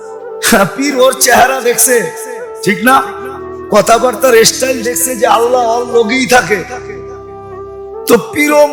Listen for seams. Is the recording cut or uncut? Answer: uncut